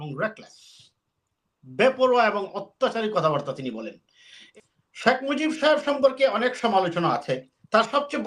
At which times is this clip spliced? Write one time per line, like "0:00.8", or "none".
0:04.4